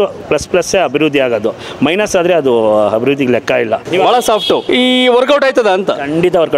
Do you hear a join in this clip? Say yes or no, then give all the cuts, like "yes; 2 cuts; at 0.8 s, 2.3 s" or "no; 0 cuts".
yes; 2 cuts; at 3.8 s, 4.6 s